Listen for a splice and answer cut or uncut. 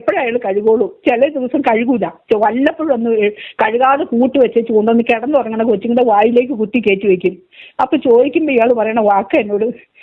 uncut